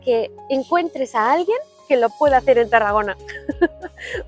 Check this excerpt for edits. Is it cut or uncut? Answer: uncut